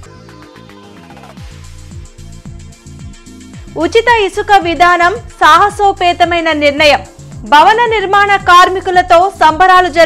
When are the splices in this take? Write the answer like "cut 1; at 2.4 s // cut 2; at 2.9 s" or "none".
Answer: cut 1; at 2.3 s